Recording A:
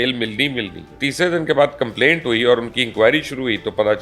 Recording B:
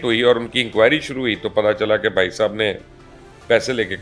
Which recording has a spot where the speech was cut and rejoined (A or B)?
A